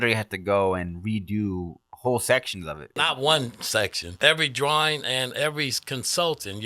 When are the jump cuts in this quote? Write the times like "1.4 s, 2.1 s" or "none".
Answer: 2.9 s, 4.0 s